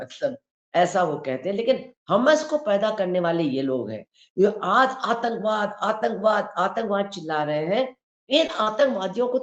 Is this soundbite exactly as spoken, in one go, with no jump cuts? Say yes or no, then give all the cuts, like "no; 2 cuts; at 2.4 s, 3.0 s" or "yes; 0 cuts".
yes; 0 cuts